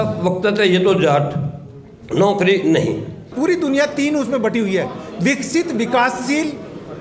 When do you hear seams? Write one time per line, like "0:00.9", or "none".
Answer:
0:03.2